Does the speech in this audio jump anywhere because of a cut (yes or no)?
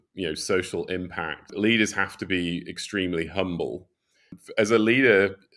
yes